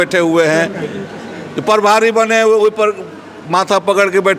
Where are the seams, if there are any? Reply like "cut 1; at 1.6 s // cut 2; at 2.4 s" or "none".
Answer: none